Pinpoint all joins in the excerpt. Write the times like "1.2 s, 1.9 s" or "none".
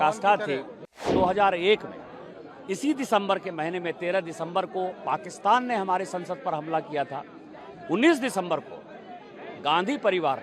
1.0 s